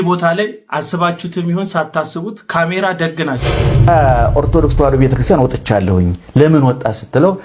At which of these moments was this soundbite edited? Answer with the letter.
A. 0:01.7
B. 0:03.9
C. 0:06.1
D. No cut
B